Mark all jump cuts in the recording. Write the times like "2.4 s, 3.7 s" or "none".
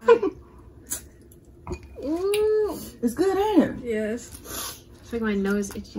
none